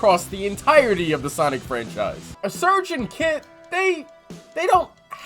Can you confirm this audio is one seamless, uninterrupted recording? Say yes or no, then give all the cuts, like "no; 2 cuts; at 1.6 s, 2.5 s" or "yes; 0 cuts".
no; 1 cut; at 2.3 s